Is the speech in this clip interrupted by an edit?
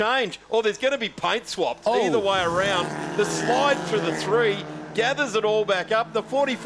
no; 0 cuts

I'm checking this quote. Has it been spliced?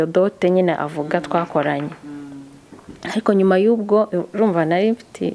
no; 0 cuts

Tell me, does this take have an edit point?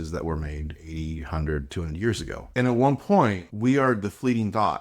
yes; 2 cuts; at 2.4 s, 3.5 s

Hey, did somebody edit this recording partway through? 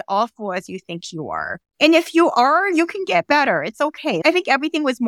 no; 0 cuts

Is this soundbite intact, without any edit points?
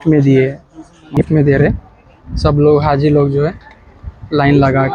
no; 1 cut; at 1.0 s

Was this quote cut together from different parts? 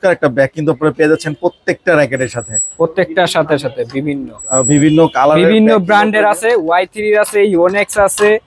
no; 0 cuts

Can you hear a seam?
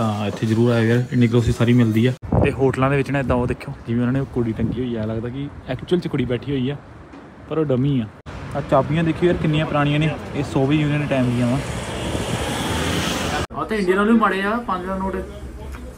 yes; 3 cuts; at 2.2 s, 8.3 s, 13.4 s

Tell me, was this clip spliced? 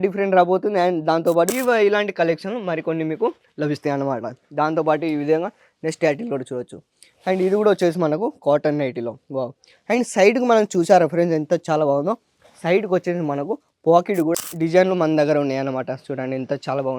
yes; 2 cuts; at 1.5 s, 14.3 s

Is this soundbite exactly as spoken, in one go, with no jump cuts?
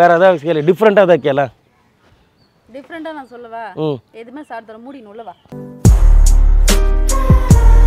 yes; 0 cuts

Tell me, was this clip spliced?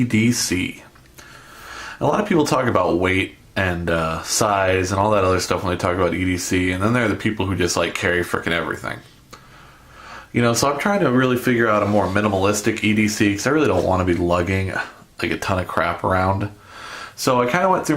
yes; 1 cut; at 6.2 s

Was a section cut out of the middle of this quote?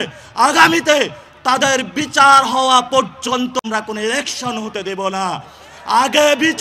yes; 1 cut; at 3.6 s

